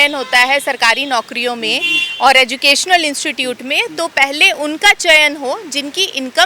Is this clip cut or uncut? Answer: uncut